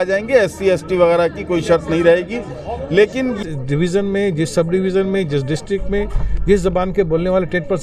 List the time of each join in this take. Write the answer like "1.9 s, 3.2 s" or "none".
3.4 s